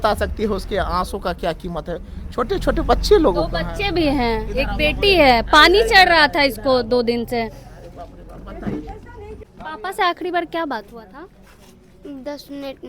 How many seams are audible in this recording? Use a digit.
1